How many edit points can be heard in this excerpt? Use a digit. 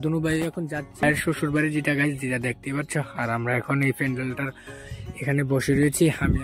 1